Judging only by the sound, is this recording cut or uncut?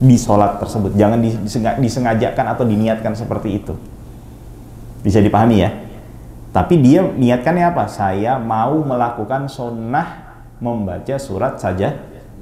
uncut